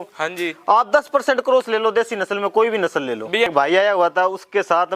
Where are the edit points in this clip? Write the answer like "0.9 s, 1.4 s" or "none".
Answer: 3.5 s

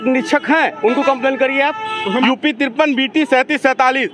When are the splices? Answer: 2.2 s

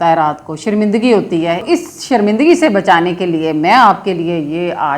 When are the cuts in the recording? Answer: 1.6 s

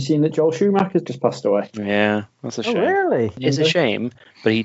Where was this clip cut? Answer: 3.4 s

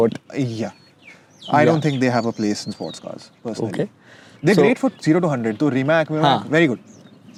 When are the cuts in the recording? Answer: none

